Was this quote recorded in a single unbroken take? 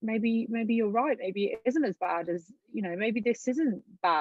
yes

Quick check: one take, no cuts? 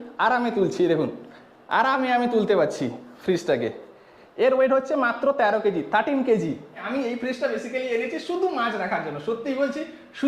no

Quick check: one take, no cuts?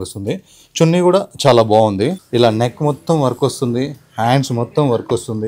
no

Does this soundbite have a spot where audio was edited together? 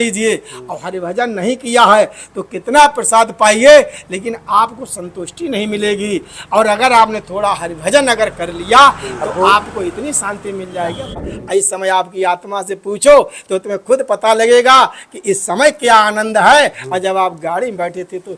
yes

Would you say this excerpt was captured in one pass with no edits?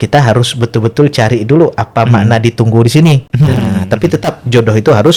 yes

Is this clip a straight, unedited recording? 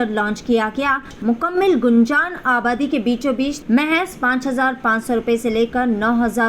no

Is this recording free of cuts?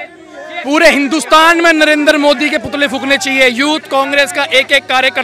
yes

